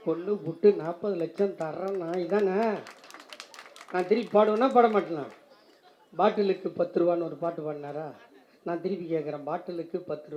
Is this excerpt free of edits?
yes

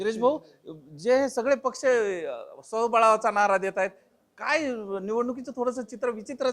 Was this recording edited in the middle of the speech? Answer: no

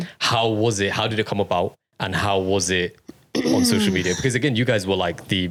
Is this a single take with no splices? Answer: yes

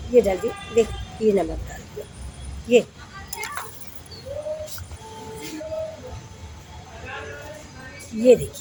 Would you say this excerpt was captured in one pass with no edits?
yes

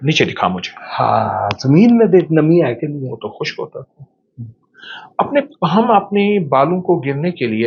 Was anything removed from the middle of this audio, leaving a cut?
no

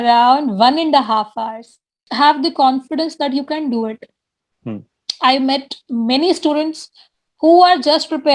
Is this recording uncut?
no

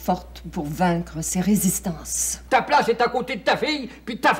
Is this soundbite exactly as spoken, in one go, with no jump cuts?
no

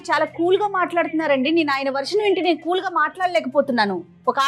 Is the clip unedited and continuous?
yes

